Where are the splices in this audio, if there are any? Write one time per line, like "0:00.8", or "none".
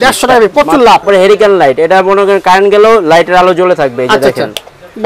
0:01.0